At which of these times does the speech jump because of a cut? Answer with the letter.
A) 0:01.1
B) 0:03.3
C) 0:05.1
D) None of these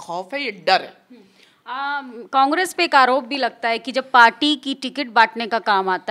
D